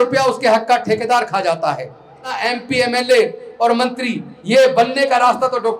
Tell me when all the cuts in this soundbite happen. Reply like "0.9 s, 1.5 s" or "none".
2.4 s